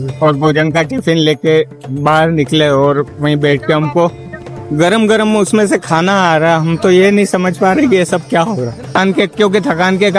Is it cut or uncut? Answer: cut